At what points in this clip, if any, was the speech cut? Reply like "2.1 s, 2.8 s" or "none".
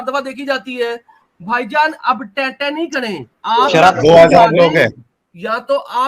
3.3 s